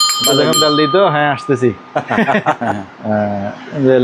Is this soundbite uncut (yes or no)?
no